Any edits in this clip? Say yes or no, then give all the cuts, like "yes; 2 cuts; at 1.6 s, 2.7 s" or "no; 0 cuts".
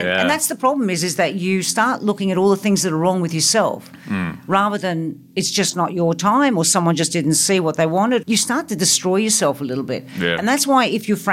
yes; 1 cut; at 8.2 s